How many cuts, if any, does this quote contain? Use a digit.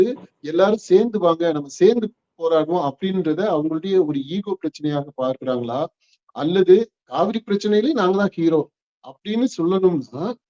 1